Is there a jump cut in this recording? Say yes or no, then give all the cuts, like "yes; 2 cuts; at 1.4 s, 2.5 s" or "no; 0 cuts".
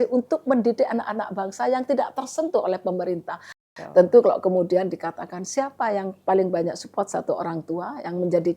yes; 1 cut; at 3.6 s